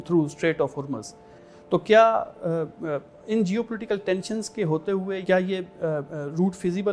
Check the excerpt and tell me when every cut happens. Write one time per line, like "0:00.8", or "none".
0:01.3
0:05.2